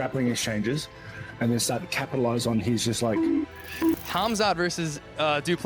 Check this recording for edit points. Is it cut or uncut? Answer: cut